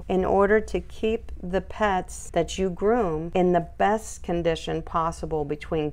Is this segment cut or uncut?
uncut